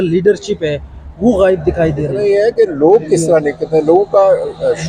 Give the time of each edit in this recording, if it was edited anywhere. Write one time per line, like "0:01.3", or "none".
0:02.1